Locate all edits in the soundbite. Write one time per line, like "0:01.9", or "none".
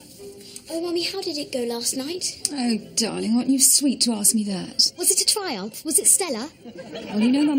none

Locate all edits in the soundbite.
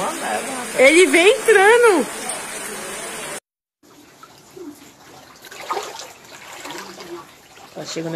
0:03.6

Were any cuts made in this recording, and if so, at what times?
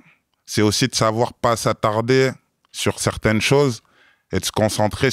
none

